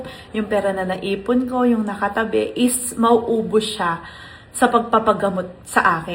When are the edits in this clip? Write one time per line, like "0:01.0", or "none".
none